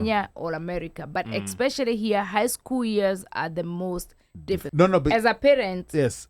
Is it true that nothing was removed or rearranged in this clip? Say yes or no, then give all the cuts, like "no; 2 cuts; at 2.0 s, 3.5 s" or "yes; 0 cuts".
no; 1 cut; at 4.7 s